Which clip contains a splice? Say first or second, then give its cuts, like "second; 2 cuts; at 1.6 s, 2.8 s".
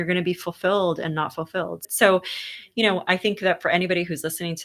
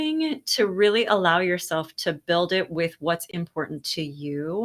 first; 1 cut; at 1.8 s